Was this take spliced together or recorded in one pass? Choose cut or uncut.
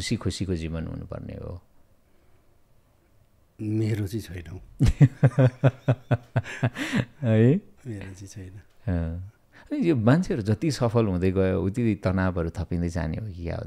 uncut